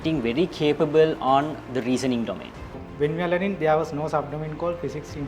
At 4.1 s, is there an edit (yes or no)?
no